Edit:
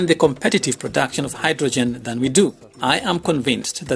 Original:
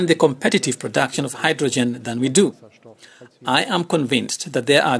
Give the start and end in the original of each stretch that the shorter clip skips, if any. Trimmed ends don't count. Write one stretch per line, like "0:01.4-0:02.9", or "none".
0:02.7-0:03.3